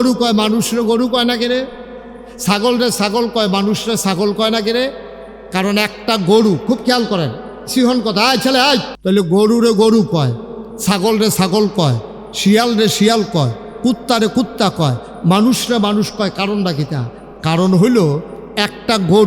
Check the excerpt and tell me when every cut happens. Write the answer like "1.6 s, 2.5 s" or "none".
8.9 s

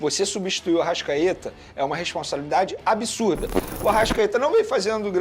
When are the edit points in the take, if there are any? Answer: 3.6 s

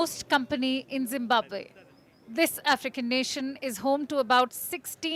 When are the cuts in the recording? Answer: none

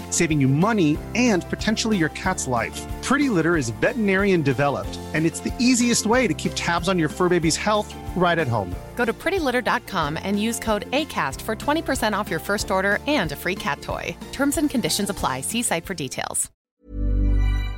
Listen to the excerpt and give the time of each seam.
16.7 s

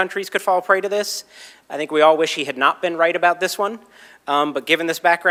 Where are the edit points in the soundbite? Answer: none

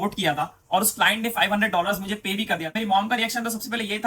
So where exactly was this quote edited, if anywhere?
2.7 s

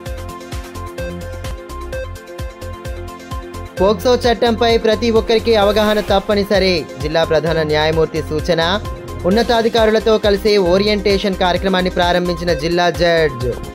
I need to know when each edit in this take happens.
1.5 s

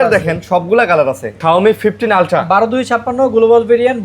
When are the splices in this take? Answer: 1.3 s

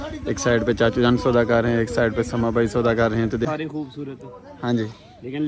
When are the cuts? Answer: 3.5 s

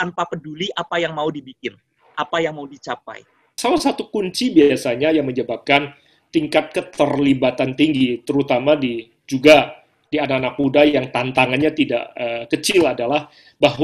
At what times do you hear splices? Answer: 3.4 s

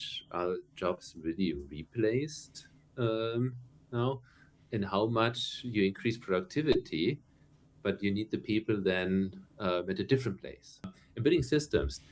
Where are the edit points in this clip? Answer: 11.0 s

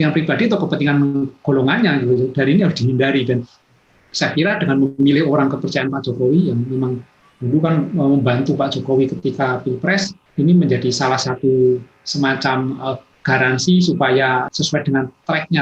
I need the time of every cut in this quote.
10.2 s, 14.5 s

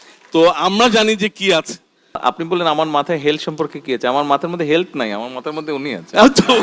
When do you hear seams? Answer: 2.2 s

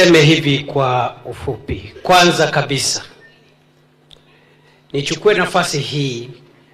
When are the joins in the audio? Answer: 2.9 s

